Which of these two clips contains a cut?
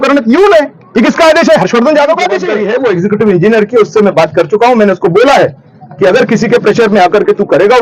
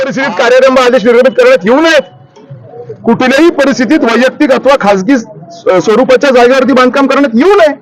first; 1 cut; at 2.5 s

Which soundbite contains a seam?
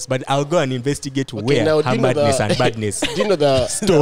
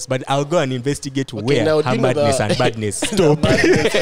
second; 1 cut; at 3.0 s

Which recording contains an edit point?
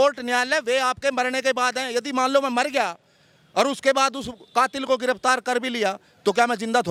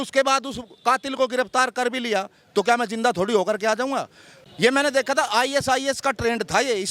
second; 1 cut; at 4.3 s

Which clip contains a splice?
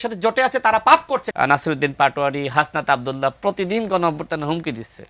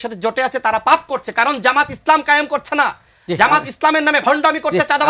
first; 1 cut; at 1.3 s

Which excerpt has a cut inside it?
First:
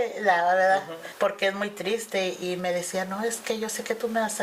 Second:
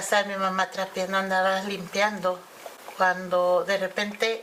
first; 2 cuts; at 1.0 s, 2.4 s

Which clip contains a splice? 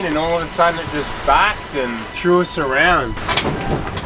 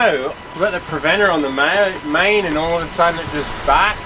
first; 1 cut; at 3.2 s

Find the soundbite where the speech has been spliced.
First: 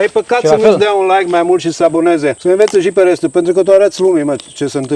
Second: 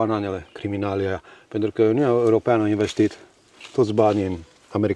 first; 1 cut; at 2.4 s

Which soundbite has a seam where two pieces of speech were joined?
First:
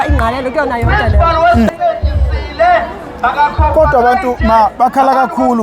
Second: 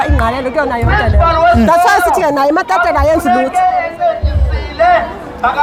first; 1 cut; at 1.7 s

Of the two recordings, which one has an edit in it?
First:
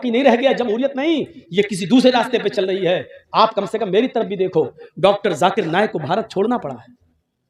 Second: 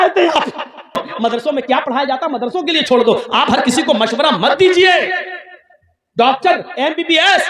second; 1 cut; at 1.1 s

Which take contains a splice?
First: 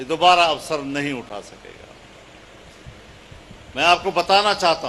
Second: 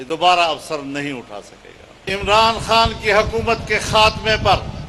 second; 1 cut; at 2.0 s

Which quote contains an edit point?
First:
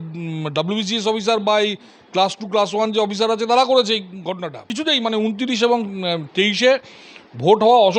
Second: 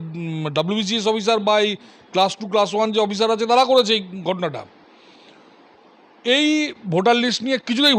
first; 1 cut; at 4.7 s

